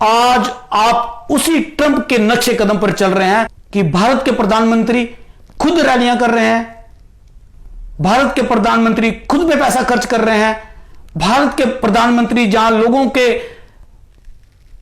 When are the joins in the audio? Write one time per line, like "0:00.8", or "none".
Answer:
0:03.6

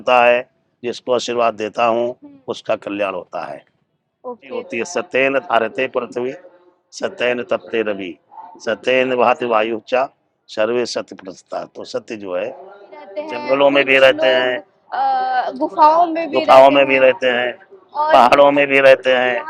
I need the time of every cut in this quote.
0:04.7
0:13.3

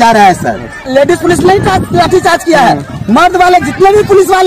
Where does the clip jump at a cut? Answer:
0:01.1

